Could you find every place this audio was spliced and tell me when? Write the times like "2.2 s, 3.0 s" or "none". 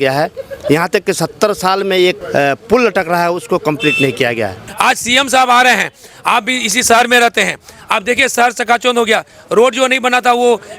2.2 s, 4.6 s